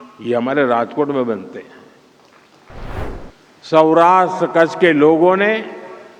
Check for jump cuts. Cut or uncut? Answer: cut